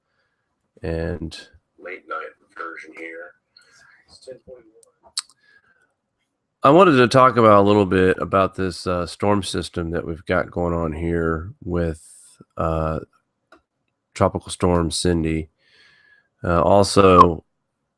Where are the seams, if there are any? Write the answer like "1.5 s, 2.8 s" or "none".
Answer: 8.2 s